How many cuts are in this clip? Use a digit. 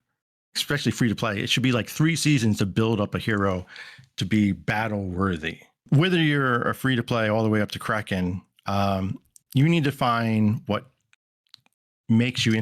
1